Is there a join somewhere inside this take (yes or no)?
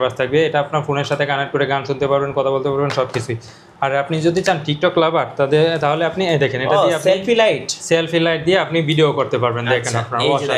no